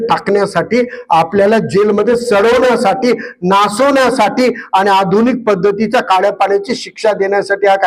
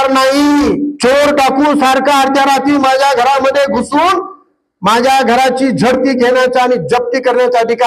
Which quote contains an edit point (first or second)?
second